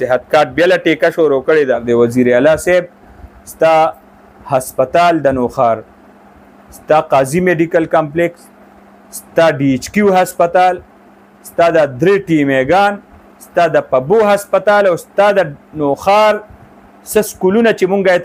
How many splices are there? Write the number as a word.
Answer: one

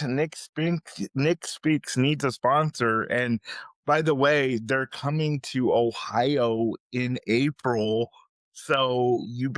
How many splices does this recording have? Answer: zero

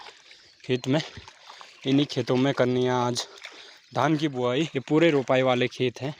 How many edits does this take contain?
one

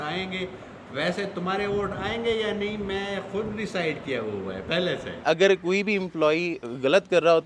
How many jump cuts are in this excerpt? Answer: one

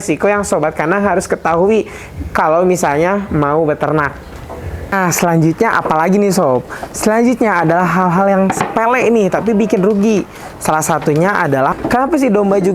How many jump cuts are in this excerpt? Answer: two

